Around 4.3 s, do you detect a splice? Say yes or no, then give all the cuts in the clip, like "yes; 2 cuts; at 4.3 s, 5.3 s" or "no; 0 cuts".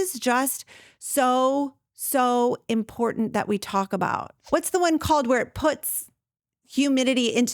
yes; 1 cut; at 4.3 s